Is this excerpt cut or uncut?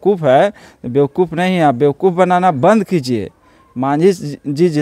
uncut